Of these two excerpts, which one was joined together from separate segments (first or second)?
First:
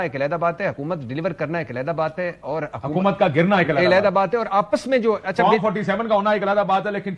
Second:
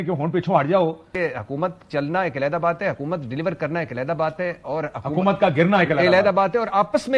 second